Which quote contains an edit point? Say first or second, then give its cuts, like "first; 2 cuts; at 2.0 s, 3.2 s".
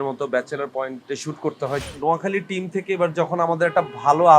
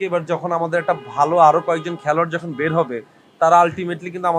first; 2 cuts; at 1.0 s, 1.8 s